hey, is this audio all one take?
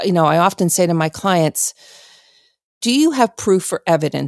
no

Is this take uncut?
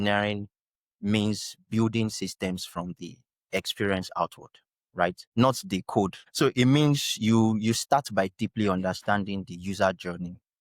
no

